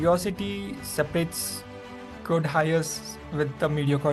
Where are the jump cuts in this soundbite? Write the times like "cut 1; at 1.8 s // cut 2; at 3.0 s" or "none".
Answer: none